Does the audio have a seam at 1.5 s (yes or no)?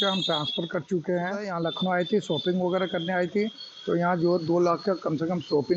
yes